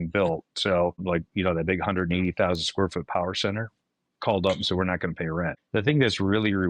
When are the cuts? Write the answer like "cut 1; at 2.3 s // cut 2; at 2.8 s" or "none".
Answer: cut 1; at 1.0 s // cut 2; at 5.6 s